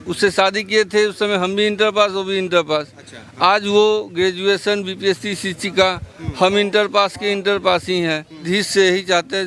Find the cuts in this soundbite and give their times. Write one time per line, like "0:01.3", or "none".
0:08.4